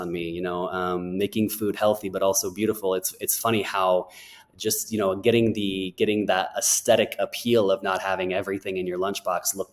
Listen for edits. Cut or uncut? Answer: uncut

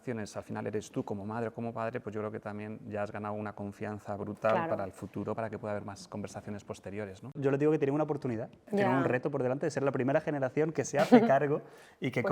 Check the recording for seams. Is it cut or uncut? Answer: cut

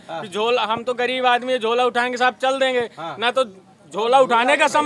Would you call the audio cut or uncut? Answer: uncut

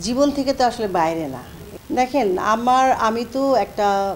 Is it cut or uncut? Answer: uncut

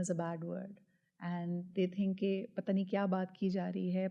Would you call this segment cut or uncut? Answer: uncut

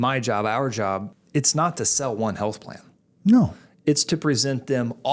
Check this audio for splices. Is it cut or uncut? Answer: cut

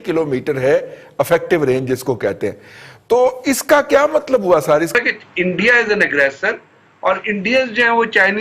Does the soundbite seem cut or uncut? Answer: cut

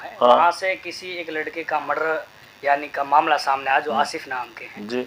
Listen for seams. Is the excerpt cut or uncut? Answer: uncut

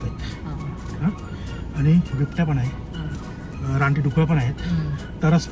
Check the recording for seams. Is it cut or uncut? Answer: uncut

